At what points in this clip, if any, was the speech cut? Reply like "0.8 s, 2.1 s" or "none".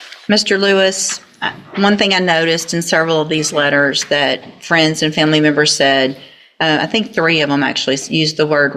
none